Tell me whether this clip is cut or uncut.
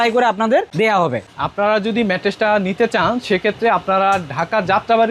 uncut